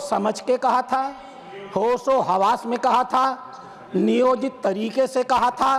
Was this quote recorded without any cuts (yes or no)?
yes